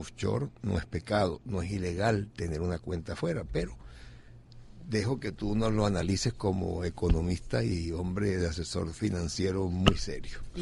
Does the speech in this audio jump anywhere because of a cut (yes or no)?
no